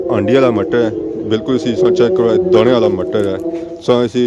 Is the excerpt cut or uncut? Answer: uncut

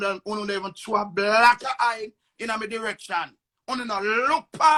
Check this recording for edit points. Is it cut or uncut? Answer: uncut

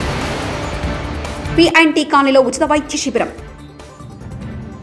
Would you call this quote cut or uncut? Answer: cut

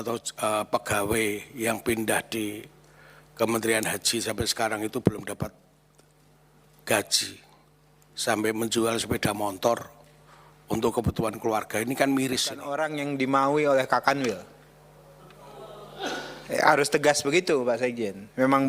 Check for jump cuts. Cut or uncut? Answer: cut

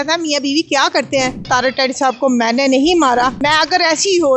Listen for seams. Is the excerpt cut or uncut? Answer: cut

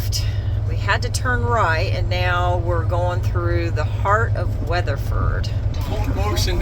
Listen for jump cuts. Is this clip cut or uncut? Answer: cut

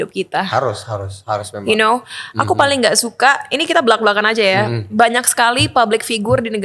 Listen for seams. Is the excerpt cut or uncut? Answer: uncut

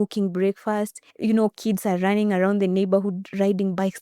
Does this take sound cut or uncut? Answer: cut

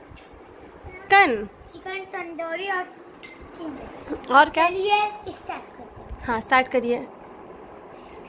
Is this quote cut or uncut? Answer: cut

